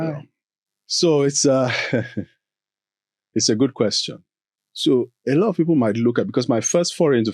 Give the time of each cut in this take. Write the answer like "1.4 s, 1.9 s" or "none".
none